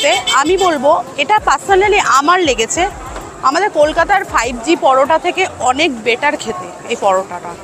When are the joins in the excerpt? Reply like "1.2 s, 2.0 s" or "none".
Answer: none